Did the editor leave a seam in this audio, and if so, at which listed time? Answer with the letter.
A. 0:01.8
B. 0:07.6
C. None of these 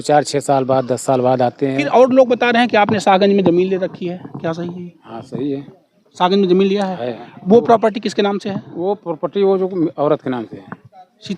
A